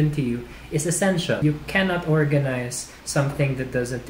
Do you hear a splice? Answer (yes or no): yes